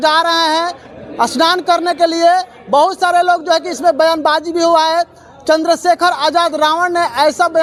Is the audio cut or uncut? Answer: uncut